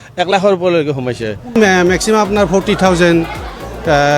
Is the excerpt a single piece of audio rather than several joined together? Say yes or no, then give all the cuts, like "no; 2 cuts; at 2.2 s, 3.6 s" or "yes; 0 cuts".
no; 1 cut; at 1.6 s